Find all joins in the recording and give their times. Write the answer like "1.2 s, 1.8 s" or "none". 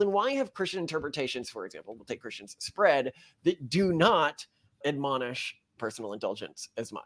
5.7 s